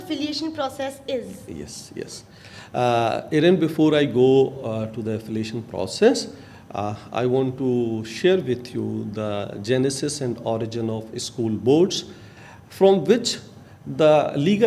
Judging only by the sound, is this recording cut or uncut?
uncut